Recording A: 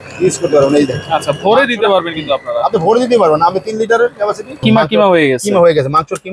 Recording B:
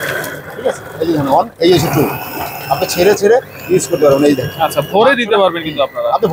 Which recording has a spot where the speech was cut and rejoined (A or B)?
A